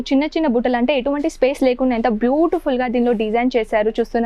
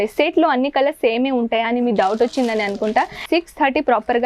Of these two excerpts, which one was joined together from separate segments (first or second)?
second